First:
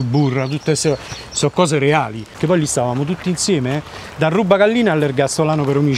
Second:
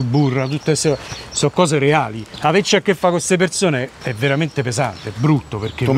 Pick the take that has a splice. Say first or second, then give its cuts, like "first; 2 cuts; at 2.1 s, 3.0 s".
first; 1 cut; at 2.3 s